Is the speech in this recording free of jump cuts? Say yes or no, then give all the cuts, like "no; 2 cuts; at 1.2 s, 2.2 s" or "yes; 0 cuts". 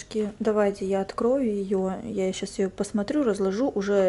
yes; 0 cuts